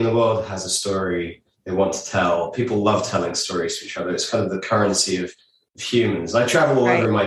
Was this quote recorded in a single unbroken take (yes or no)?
yes